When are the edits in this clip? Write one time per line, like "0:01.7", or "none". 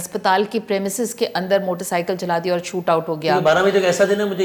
none